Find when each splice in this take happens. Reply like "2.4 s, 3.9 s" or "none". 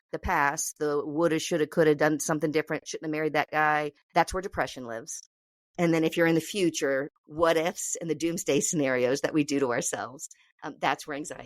4.0 s, 7.1 s